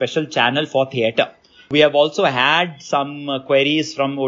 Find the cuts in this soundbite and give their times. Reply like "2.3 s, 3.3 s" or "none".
1.7 s